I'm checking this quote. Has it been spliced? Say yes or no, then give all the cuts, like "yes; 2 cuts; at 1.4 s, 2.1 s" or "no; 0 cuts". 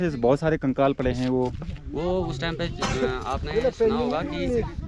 no; 0 cuts